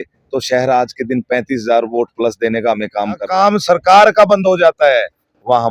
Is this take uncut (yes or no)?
no